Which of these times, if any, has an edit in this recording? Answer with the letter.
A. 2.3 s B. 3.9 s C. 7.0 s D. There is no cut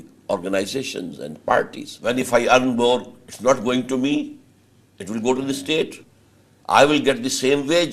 A